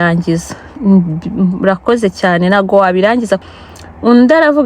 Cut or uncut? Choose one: cut